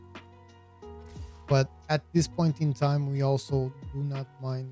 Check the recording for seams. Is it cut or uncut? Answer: uncut